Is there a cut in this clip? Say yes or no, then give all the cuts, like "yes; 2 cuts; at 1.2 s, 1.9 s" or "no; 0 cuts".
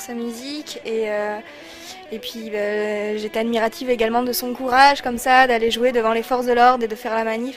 no; 0 cuts